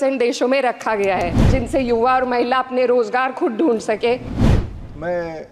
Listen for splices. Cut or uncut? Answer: cut